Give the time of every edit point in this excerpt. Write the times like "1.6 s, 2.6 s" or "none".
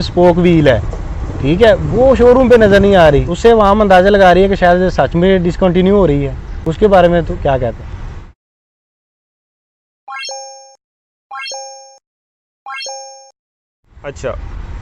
none